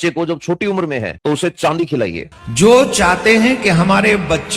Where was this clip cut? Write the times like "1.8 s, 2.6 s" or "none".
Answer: 1.1 s, 2.3 s